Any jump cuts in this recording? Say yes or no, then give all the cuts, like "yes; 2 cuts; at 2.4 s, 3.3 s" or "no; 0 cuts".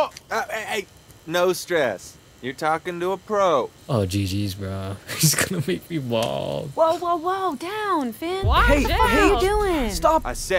yes; 1 cut; at 3.8 s